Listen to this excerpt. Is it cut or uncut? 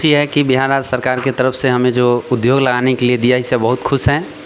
uncut